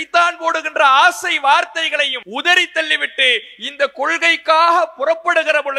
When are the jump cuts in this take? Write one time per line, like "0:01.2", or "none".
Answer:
0:02.2